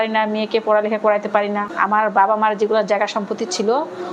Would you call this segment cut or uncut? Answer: cut